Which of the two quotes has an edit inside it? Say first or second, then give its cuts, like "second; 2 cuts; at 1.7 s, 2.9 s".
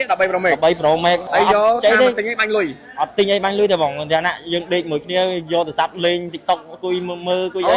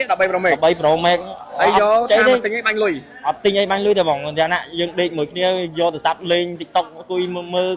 first; 1 cut; at 1.2 s